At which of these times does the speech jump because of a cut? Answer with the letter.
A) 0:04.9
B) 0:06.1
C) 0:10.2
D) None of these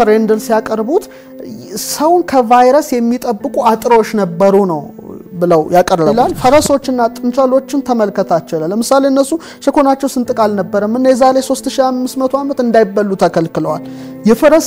B